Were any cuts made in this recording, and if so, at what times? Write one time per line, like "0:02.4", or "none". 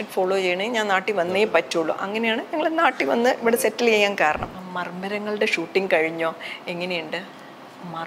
0:04.6